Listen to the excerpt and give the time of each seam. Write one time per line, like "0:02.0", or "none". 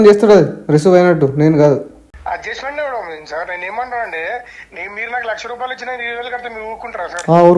0:02.0